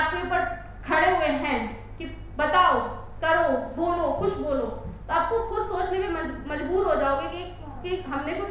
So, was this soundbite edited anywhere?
no; 0 cuts

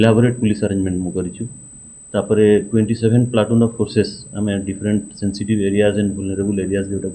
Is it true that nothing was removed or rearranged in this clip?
yes; 0 cuts

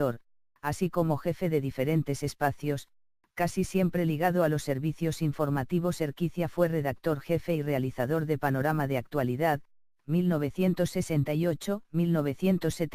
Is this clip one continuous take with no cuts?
yes; 0 cuts

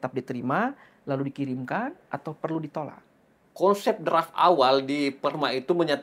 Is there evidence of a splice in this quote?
no; 0 cuts

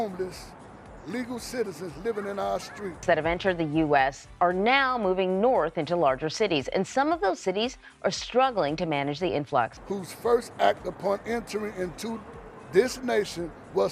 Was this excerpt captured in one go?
no; 2 cuts; at 2.8 s, 9.7 s

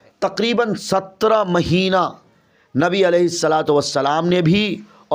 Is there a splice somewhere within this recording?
no; 0 cuts

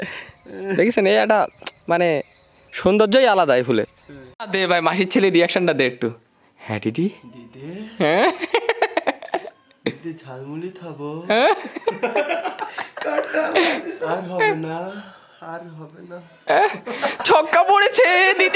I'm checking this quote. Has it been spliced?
yes; 1 cut; at 4.4 s

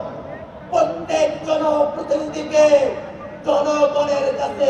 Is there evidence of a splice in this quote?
no; 0 cuts

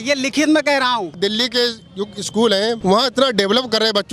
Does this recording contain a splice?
yes; 2 cuts; at 1.2 s, 2.8 s

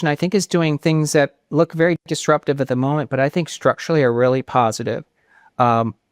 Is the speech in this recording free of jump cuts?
yes; 0 cuts

